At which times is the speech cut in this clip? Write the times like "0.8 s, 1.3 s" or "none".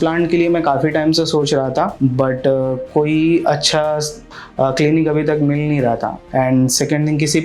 6.3 s